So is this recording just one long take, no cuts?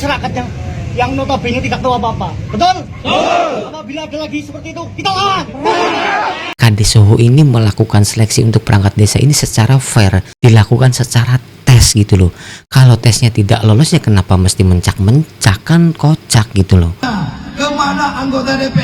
no; 2 cuts; at 6.5 s, 17.0 s

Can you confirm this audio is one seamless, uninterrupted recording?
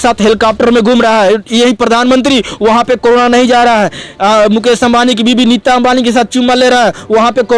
yes; 0 cuts

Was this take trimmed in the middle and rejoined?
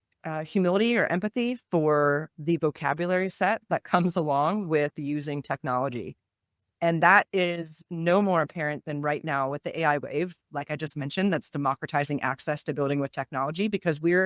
no; 0 cuts

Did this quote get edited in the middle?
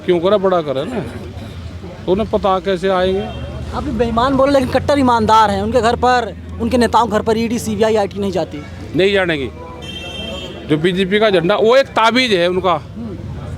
no; 0 cuts

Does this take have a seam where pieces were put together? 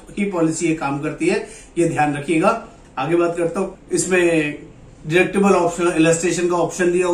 no; 0 cuts

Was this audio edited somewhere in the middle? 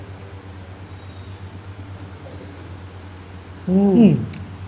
no; 0 cuts

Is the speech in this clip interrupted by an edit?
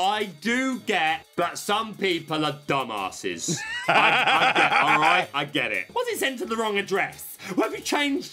yes; 2 cuts; at 1.3 s, 5.9 s

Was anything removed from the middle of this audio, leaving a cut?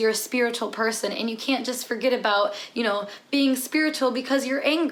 no; 0 cuts

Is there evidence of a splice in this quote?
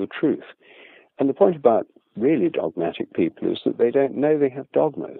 no; 0 cuts

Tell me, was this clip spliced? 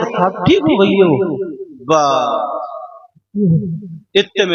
no; 0 cuts

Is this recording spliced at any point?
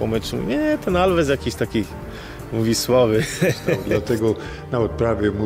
yes; 1 cut; at 3.9 s

